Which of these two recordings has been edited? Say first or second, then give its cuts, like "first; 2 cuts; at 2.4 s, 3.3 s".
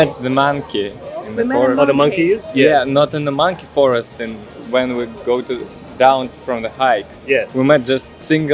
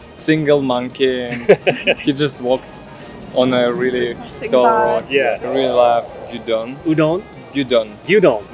second; 1 cut; at 5.4 s